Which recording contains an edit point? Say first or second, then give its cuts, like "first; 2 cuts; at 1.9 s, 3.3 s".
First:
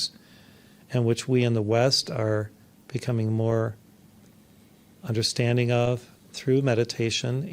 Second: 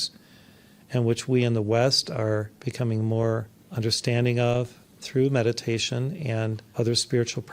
second; 3 cuts; at 2.6 s, 3.6 s, 6.6 s